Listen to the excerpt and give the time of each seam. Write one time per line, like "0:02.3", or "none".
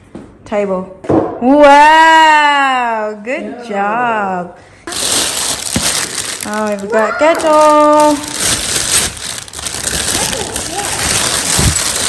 0:00.9
0:04.9